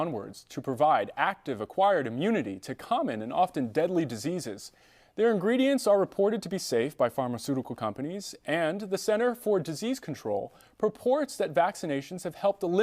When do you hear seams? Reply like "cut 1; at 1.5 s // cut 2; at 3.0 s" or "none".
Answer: cut 1; at 11.2 s